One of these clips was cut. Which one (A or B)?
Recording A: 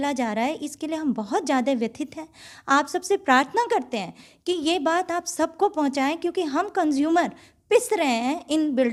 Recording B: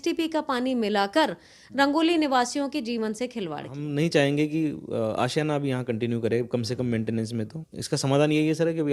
B